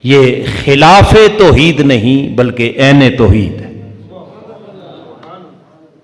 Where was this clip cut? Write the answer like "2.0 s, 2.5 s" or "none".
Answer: none